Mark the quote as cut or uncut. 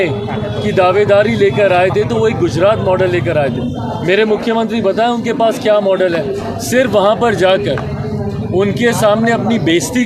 uncut